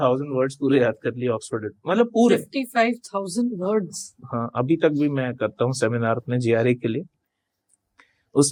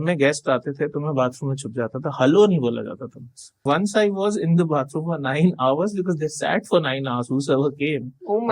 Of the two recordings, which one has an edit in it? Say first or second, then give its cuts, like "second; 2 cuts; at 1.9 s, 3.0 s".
second; 1 cut; at 3.6 s